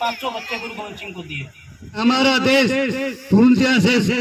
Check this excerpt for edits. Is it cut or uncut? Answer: cut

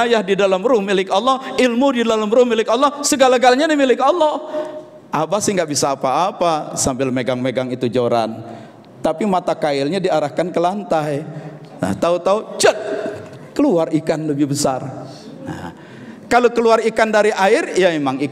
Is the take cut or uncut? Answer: uncut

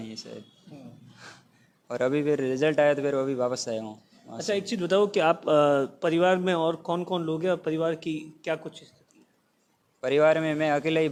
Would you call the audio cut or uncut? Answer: uncut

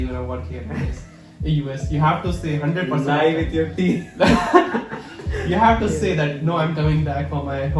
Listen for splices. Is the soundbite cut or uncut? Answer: uncut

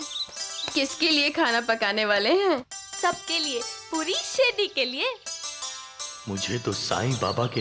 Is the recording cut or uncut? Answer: uncut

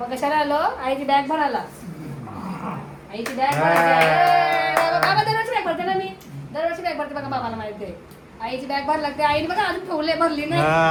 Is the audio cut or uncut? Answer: uncut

